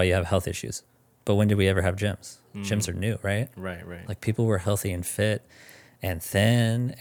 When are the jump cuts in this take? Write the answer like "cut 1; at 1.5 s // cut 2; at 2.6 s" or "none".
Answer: none